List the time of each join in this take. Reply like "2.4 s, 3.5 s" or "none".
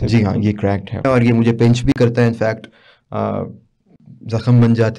1.0 s